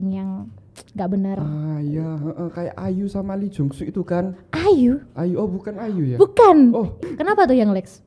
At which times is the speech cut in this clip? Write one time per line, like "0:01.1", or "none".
0:06.9